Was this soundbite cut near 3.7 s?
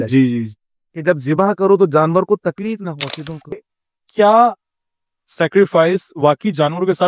yes; 1 cut; at 3.7 s

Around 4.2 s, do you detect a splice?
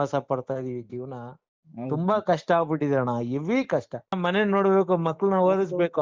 yes; 1 cut; at 4.2 s

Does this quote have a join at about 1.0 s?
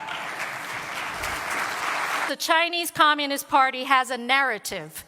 no; 1 cut; at 2.3 s

